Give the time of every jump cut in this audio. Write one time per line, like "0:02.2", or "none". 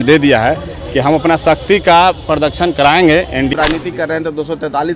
0:03.5

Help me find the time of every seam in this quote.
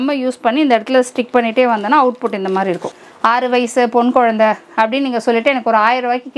0:02.9

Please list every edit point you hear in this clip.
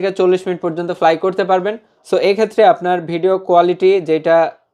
none

